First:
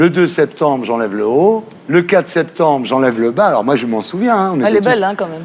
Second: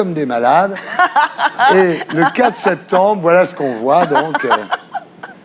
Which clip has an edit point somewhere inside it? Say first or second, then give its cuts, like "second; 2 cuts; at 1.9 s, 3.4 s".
first; 1 cut; at 1.7 s